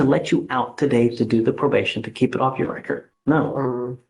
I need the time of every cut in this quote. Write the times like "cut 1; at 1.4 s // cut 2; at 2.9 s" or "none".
cut 1; at 3.1 s